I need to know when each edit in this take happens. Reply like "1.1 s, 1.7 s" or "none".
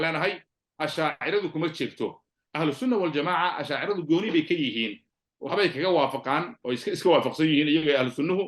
none